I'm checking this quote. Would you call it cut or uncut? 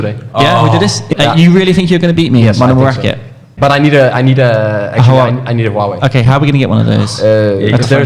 cut